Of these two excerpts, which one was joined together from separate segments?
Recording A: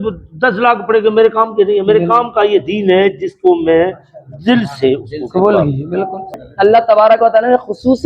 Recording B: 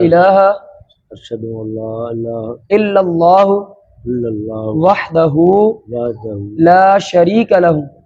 A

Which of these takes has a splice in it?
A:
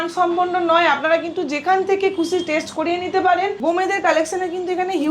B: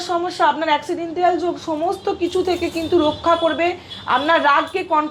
A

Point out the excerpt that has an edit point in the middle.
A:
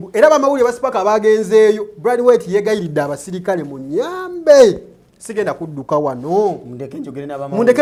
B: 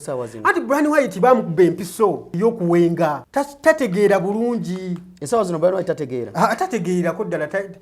B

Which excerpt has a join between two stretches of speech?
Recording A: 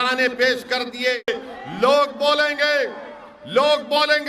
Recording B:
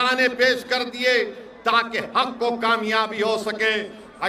A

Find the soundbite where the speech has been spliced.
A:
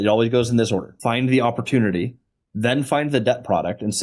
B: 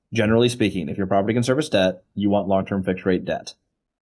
A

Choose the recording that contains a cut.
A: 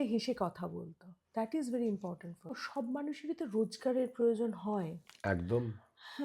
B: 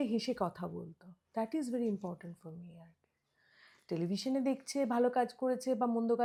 A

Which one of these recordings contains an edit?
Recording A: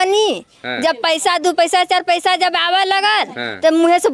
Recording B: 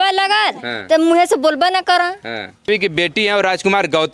B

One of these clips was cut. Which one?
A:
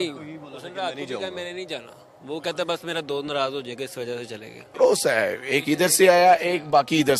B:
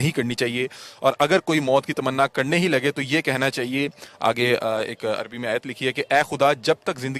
A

